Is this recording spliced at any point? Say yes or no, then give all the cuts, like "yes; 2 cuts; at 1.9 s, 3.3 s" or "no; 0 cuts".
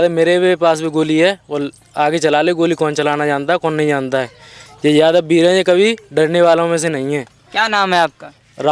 no; 0 cuts